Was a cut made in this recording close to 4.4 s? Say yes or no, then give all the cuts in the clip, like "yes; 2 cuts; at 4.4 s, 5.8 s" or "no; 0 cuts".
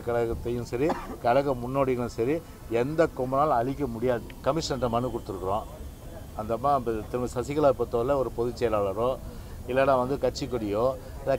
yes; 1 cut; at 4.4 s